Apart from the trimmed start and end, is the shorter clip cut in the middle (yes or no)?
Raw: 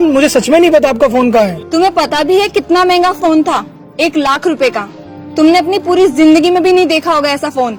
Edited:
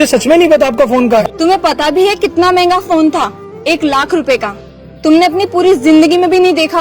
yes